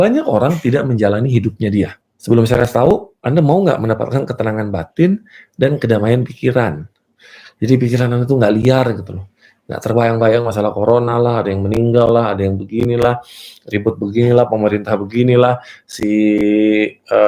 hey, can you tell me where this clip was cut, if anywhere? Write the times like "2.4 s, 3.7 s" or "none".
2.0 s

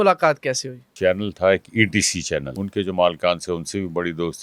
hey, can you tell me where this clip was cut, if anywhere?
0.9 s, 2.6 s

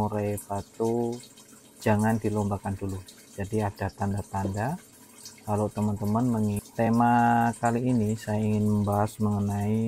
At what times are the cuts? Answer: 6.6 s

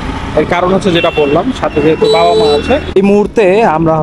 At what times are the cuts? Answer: 2.9 s

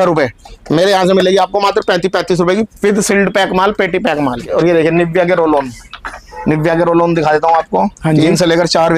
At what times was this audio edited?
4.5 s

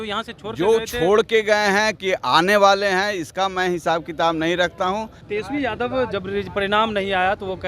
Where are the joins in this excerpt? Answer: 5.2 s

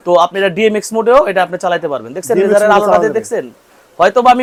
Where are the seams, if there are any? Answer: none

